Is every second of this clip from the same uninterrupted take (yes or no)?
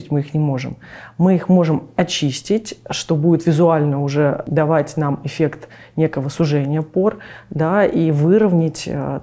no